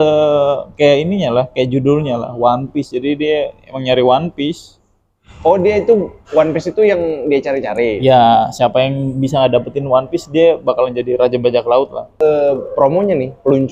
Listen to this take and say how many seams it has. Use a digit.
1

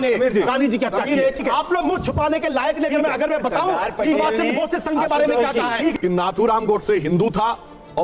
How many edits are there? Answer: 2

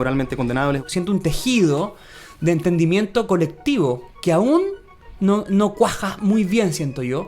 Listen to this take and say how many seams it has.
2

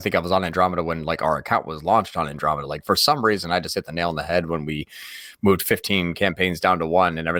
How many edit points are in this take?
0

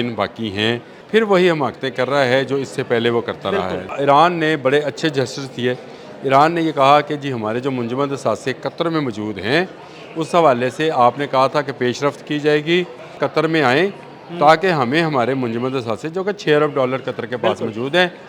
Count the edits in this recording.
3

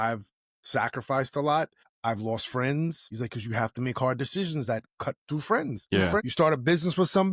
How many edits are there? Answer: 3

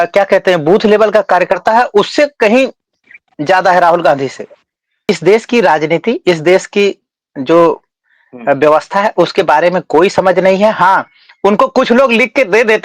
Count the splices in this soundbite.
1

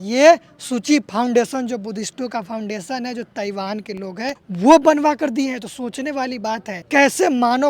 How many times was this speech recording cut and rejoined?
2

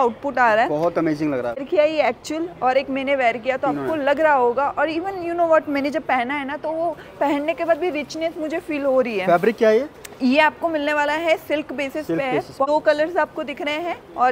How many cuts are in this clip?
2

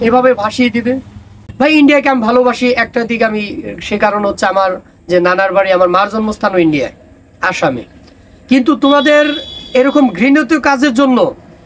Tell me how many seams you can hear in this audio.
1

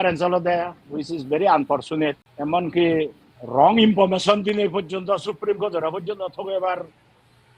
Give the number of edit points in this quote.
1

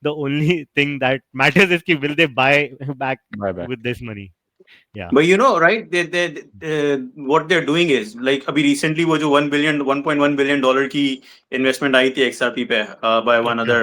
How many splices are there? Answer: 0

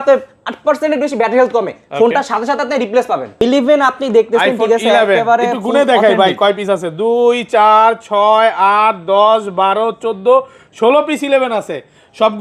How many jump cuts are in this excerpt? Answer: 1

